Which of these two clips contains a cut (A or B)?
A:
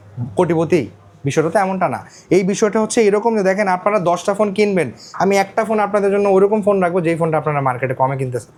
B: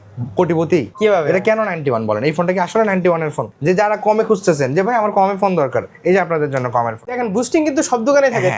B